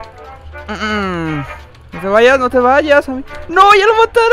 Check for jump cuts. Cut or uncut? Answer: uncut